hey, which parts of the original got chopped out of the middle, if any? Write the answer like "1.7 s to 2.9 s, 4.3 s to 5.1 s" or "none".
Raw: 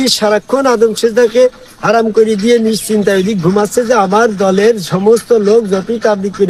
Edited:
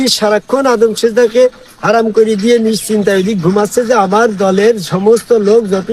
none